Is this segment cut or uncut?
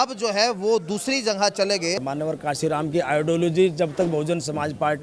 cut